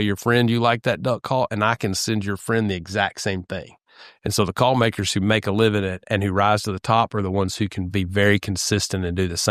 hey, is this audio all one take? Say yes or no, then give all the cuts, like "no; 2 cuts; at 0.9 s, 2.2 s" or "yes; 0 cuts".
yes; 0 cuts